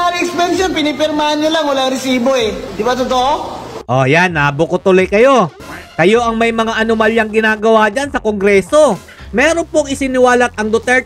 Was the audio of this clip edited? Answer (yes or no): yes